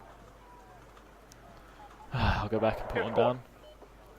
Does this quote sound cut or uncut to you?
cut